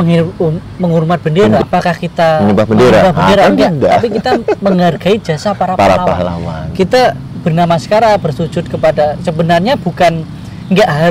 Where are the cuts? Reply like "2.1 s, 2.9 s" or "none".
1.6 s

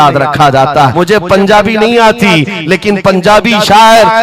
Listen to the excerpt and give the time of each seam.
0.9 s

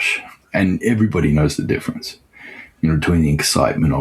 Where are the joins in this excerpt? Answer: none

